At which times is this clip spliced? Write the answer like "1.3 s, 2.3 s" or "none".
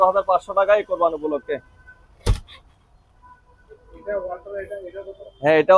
none